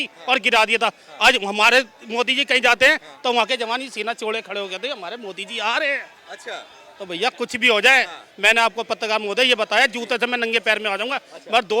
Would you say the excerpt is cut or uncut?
uncut